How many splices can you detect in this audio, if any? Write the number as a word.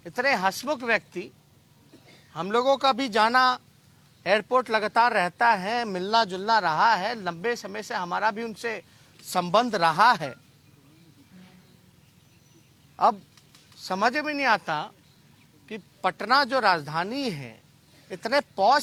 zero